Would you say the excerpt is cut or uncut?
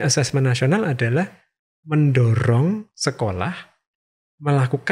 uncut